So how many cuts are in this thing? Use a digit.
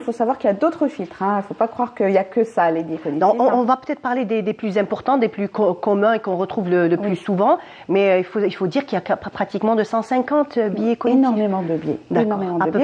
0